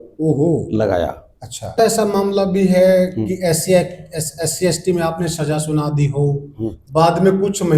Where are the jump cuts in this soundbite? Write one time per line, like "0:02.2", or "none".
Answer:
0:01.7